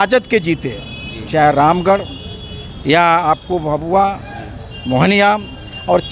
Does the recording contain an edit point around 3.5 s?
no; 0 cuts

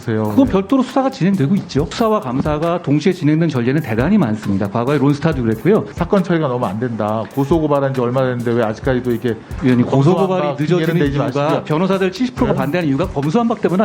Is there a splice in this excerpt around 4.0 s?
no; 3 cuts; at 1.9 s, 6.0 s, 9.5 s

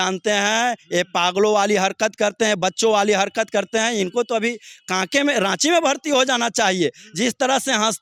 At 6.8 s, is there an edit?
no; 0 cuts

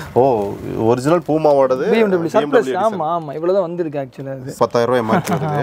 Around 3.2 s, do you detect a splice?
no; 1 cut; at 4.6 s

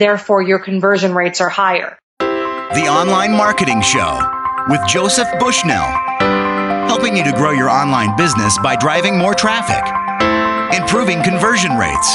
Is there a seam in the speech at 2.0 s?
yes; 1 cut; at 2.0 s

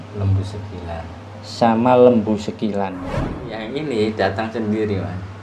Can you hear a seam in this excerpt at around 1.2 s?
no; 1 cut; at 3.0 s

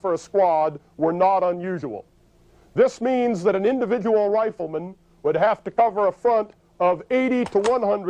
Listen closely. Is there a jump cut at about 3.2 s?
no; 1 cut; at 4.6 s

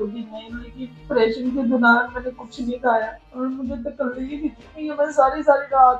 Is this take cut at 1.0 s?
no; 1 cut; at 3.2 s

